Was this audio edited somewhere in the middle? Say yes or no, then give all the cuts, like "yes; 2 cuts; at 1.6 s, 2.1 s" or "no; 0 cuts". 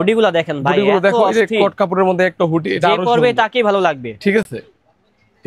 no; 0 cuts